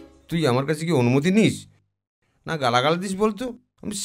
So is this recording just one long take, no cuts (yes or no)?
yes